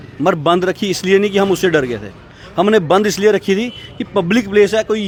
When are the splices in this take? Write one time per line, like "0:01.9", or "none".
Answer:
none